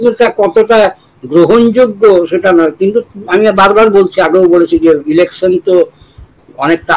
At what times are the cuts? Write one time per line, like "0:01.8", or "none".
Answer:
none